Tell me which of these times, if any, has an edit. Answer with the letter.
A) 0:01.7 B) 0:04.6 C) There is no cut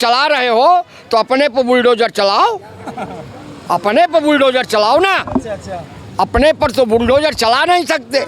C